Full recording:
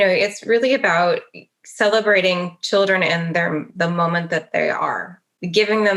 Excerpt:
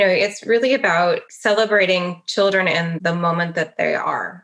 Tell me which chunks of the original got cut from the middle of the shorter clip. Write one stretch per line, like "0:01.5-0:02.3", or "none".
0:01.3-0:01.7
0:03.3-0:03.7